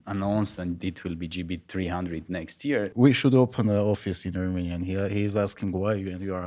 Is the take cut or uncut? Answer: cut